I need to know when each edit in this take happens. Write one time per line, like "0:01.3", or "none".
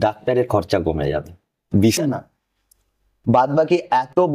0:02.0

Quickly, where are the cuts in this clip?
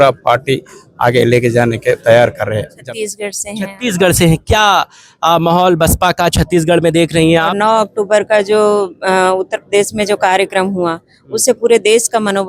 0:02.7
0:07.5

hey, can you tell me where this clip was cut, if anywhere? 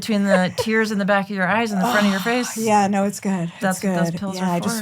none

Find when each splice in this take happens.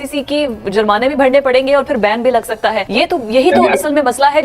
0:02.8

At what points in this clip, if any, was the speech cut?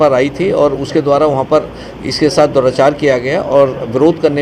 none

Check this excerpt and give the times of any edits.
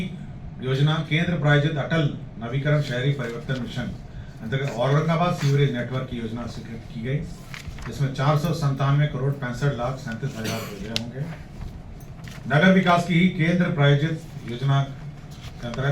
0:12.2

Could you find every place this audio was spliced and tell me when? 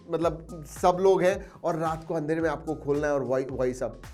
none

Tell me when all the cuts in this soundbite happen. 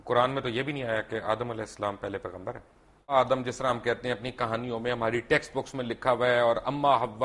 0:03.1

